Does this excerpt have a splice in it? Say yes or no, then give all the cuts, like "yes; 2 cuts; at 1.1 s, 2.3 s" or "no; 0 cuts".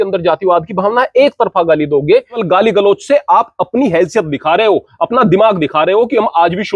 yes; 1 cut; at 2.4 s